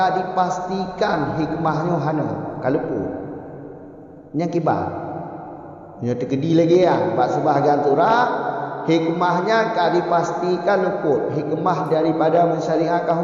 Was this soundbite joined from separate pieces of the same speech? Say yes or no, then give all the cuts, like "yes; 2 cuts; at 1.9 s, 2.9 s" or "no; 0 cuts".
no; 0 cuts